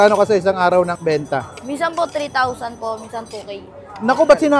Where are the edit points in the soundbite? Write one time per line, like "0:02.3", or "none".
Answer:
0:00.9